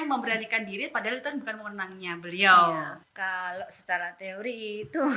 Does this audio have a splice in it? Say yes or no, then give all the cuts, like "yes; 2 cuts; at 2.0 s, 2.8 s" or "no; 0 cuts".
yes; 1 cut; at 3.0 s